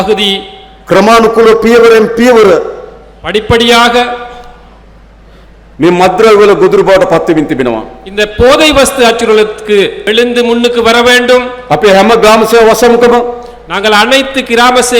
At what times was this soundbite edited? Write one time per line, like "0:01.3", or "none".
0:10.0